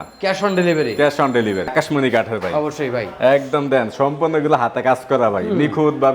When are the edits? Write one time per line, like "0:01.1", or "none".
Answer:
0:01.7